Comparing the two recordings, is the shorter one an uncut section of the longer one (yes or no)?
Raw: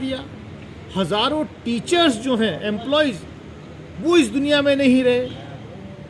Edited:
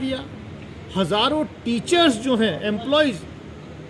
yes